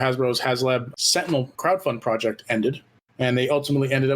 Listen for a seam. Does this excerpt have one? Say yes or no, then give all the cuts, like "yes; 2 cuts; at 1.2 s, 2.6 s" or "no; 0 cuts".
yes; 1 cut; at 1.0 s